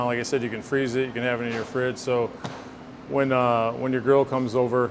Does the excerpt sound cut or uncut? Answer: uncut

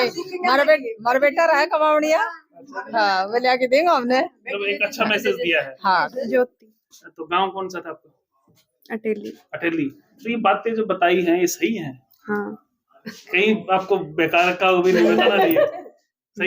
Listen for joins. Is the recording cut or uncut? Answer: cut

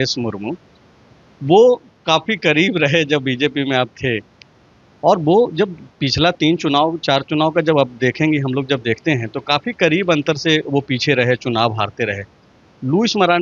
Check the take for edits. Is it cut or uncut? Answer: uncut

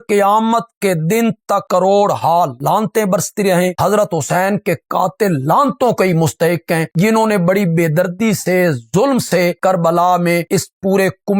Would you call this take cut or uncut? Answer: uncut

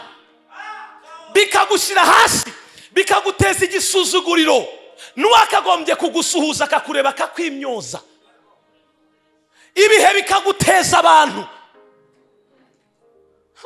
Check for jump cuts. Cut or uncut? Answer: uncut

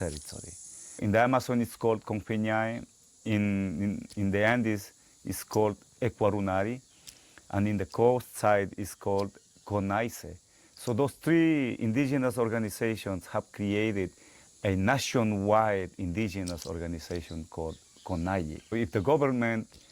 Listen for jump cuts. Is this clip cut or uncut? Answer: cut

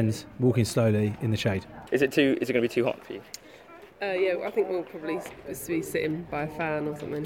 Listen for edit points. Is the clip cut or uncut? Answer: uncut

